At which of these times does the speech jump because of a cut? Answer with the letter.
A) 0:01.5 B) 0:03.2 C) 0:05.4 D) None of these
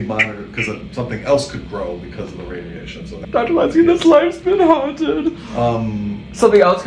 B